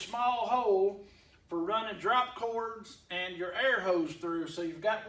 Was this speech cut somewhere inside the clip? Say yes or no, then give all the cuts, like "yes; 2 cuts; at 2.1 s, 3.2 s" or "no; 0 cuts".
no; 0 cuts